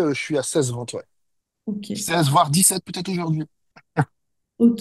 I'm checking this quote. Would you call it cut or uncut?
uncut